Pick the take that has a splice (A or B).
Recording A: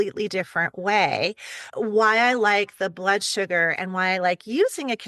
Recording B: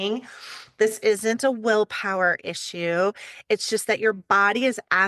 A